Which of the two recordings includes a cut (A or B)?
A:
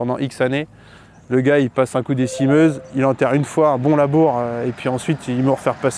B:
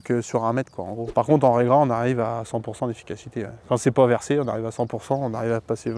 B